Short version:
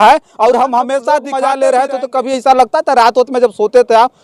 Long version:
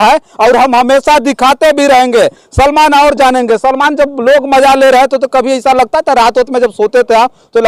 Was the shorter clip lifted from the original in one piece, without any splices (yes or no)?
no